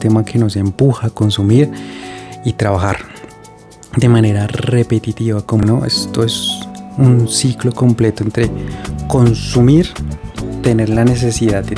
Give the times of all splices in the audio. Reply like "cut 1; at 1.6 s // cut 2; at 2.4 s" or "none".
cut 1; at 5.6 s